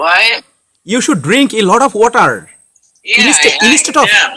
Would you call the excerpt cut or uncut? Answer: uncut